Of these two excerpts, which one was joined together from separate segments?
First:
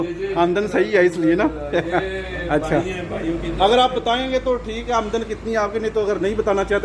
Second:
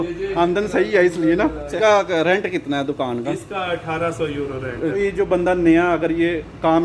second; 2 cuts; at 1.8 s, 5.0 s

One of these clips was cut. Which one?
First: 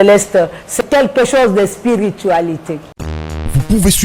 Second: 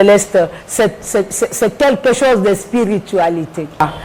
first; 2 cuts; at 0.8 s, 2.7 s

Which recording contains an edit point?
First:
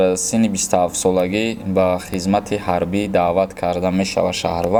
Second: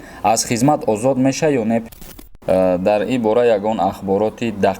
second; 1 cut; at 1.9 s

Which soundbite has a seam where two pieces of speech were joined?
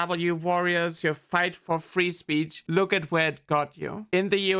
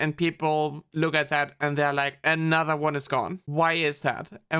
first; 2 cuts; at 1.6 s, 2.6 s

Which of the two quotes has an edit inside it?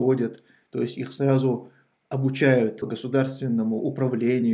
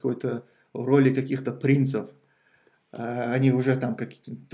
first; 1 cut; at 2.9 s

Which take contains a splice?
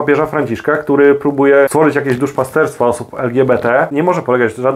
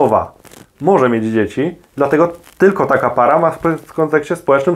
first; 2 cuts; at 1.7 s, 3.9 s

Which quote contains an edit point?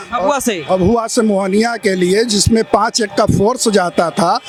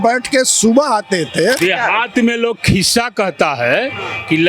second; 1 cut; at 1.6 s

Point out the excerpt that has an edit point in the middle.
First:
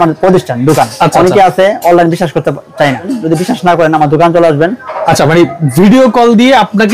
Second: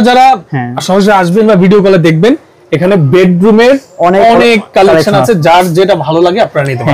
first; 1 cut; at 3.1 s

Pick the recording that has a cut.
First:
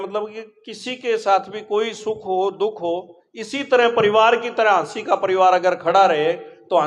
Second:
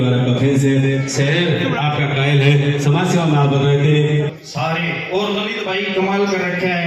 second; 1 cut; at 4.3 s

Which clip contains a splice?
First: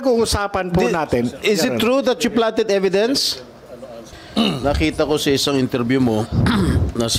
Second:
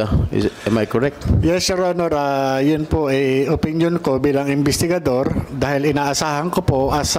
first; 1 cut; at 4.1 s

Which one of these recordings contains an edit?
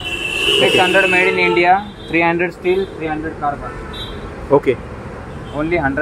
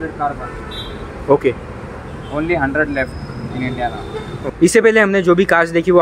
second; 1 cut; at 4.5 s

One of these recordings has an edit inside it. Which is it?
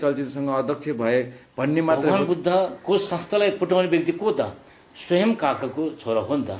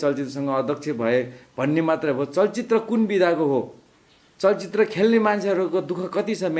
first; 1 cut; at 2.1 s

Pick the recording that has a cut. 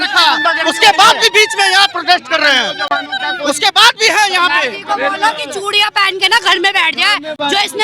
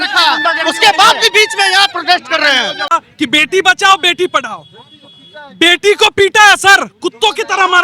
second; 1 cut; at 2.9 s

